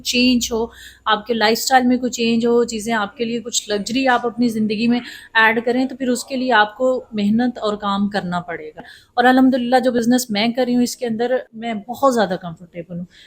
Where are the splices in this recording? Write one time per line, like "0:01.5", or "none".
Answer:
0:09.0
0:11.5